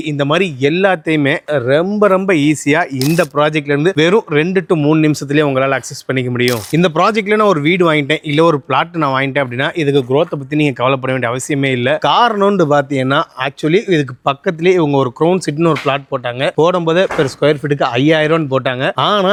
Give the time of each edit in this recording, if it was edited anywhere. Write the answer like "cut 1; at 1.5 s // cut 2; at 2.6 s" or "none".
none